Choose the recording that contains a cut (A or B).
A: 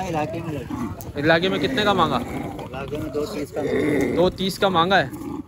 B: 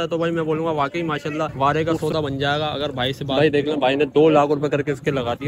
B